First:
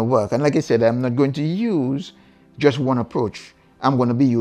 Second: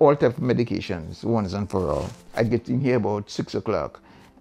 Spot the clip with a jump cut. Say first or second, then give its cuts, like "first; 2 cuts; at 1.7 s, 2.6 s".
second; 1 cut; at 2.2 s